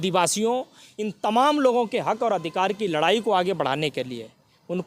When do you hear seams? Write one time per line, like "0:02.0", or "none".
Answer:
none